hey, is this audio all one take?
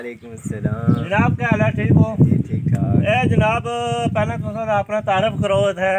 yes; 0 cuts

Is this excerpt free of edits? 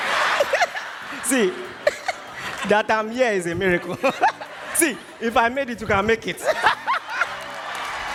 yes; 0 cuts

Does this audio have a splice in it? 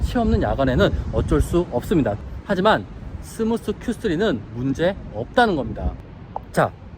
yes; 2 cuts; at 2.2 s, 6.0 s

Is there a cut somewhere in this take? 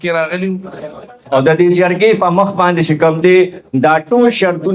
yes; 1 cut; at 1.3 s

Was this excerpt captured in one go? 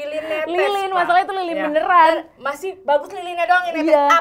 yes; 0 cuts

